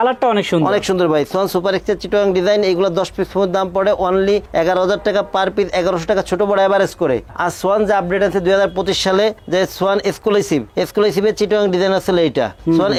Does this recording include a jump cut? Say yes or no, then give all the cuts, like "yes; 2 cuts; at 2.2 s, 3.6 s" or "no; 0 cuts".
no; 0 cuts